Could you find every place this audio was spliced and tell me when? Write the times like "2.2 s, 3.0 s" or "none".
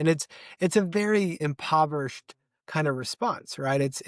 1.4 s